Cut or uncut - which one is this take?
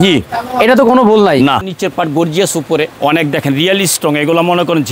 cut